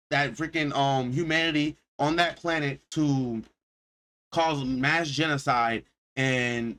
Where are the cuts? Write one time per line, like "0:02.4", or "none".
none